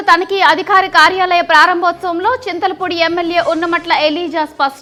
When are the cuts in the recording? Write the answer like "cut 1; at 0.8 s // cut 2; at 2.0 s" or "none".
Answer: none

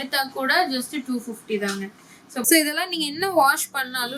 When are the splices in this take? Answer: cut 1; at 2.4 s

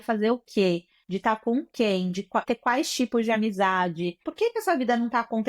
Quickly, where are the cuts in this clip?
cut 1; at 2.5 s // cut 2; at 4.2 s

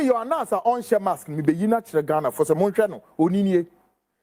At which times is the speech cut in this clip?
none

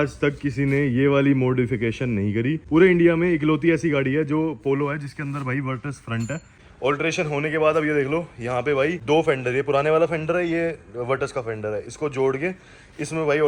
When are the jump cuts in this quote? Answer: cut 1; at 2.6 s // cut 2; at 6.6 s // cut 3; at 9.0 s

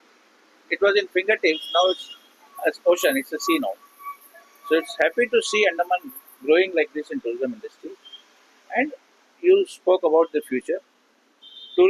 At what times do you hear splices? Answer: none

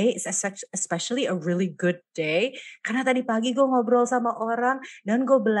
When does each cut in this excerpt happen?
none

